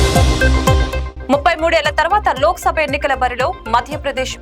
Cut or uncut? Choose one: cut